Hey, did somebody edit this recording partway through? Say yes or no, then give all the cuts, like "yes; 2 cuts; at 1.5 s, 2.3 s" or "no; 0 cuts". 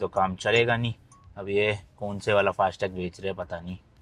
no; 0 cuts